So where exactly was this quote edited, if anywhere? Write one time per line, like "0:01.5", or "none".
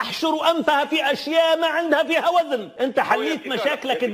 0:02.7